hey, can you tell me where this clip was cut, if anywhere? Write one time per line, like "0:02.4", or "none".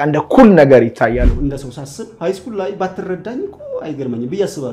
0:01.3